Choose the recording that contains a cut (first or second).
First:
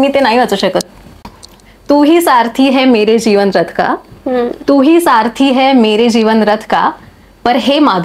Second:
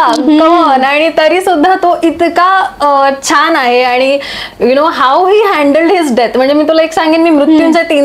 first